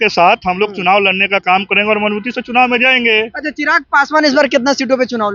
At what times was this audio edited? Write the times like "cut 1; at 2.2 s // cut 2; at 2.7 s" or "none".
none